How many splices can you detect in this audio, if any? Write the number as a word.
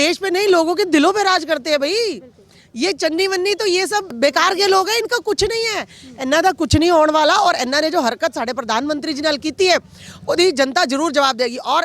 one